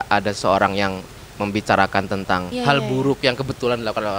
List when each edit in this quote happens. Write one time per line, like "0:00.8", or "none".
0:02.5